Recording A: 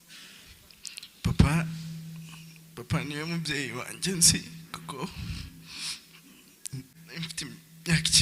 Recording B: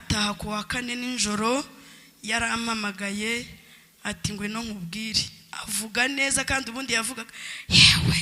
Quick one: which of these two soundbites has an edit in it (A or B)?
A